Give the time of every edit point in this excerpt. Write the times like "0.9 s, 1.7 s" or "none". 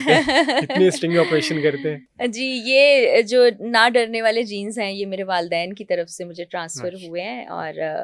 none